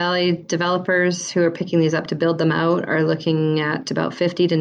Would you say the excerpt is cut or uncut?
uncut